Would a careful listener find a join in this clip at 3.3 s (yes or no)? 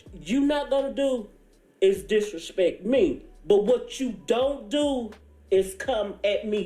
yes